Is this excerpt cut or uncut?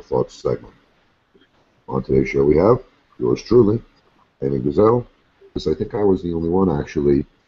uncut